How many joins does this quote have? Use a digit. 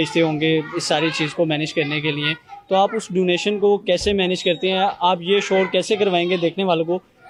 0